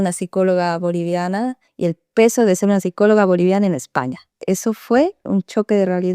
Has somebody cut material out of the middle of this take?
yes; 3 cuts; at 1.7 s, 4.3 s, 5.2 s

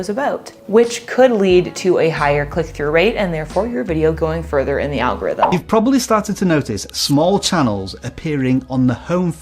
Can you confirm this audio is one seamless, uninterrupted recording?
no; 1 cut; at 5.4 s

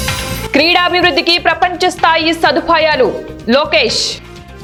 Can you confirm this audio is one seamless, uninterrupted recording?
yes; 0 cuts

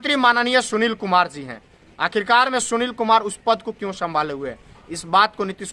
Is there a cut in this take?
no; 0 cuts

